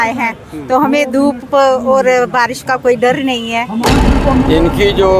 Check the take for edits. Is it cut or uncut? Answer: cut